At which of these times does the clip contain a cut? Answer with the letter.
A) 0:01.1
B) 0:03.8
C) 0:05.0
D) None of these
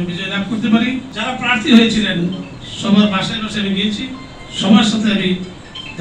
A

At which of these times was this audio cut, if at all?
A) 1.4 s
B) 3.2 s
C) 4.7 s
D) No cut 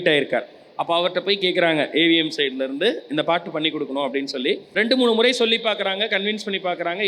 C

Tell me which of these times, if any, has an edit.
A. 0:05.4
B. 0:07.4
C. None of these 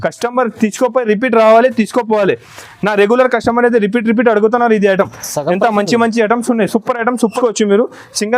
B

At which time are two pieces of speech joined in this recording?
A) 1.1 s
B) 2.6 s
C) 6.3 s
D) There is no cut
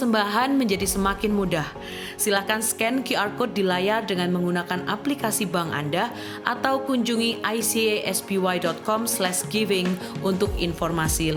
D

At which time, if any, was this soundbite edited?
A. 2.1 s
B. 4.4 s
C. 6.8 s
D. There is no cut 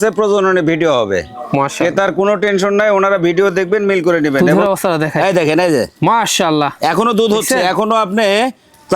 B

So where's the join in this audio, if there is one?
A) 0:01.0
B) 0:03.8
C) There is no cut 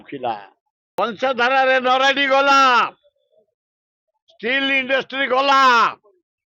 A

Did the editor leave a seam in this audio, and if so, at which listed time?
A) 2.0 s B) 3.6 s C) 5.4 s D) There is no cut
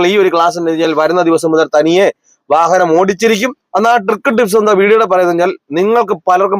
B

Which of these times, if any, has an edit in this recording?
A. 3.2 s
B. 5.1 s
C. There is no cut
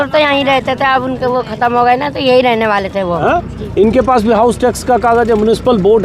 A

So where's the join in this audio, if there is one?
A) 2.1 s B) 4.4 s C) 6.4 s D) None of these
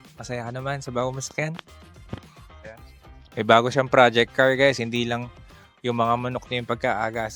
D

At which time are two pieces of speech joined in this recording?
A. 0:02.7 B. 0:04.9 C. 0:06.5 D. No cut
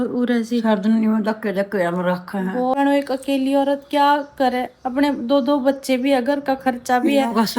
A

